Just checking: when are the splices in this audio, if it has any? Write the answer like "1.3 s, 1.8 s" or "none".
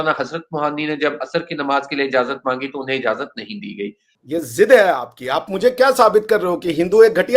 4.1 s